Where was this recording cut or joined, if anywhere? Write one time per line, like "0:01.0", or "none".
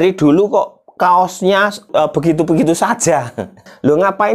0:01.9
0:03.5